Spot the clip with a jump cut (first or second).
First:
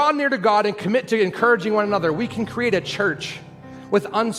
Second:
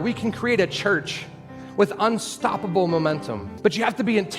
second